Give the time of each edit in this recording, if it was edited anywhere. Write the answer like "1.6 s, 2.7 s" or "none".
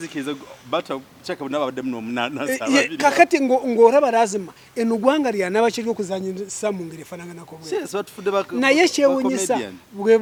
none